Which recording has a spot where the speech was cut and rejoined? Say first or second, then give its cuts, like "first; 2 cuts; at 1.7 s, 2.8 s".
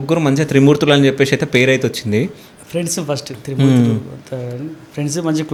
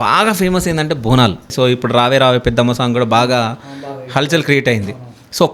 second; 1 cut; at 1.4 s